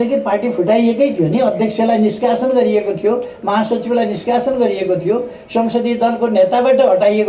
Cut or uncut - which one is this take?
uncut